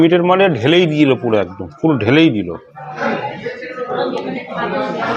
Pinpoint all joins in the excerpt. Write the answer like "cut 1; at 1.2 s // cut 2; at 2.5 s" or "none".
cut 1; at 3.1 s